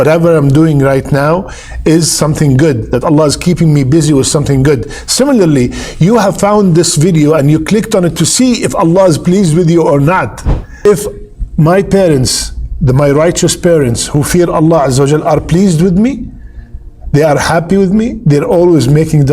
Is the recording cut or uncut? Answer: cut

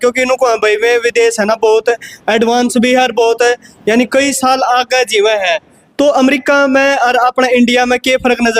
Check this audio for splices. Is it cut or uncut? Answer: uncut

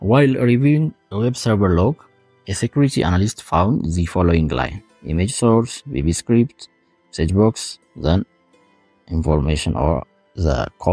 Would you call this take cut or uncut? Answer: uncut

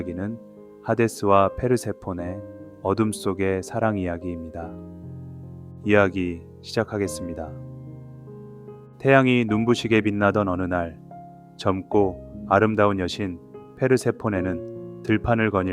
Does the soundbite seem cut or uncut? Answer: cut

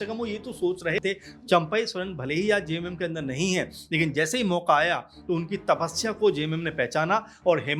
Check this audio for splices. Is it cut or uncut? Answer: cut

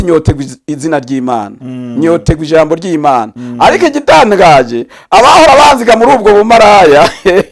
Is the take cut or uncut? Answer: uncut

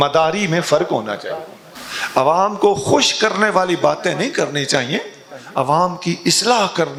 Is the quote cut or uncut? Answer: uncut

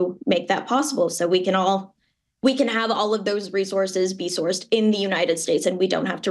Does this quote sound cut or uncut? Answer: uncut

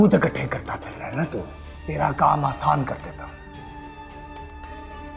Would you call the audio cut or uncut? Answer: cut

